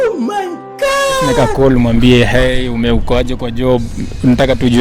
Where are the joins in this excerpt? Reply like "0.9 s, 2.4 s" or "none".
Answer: 1.4 s